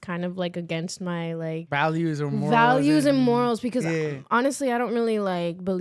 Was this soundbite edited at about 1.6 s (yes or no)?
yes